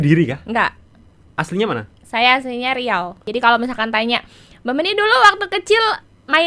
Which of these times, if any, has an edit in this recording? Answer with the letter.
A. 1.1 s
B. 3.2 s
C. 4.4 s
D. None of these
B